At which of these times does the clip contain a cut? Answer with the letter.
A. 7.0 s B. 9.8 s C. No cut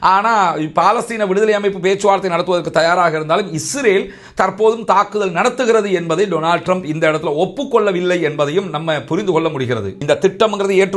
B